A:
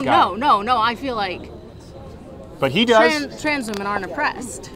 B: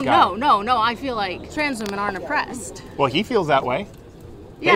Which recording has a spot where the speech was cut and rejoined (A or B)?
B